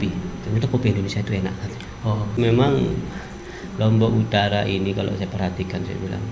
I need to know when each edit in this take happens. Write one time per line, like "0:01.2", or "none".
0:02.4